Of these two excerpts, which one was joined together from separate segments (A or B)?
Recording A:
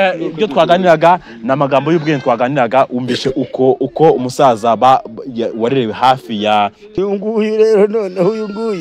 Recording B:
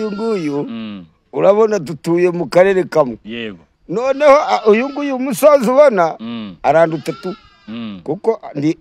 A